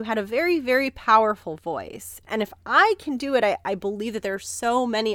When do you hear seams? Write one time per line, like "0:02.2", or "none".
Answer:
0:02.2